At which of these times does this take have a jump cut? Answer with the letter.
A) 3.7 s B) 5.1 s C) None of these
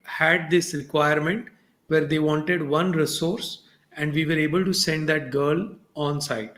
C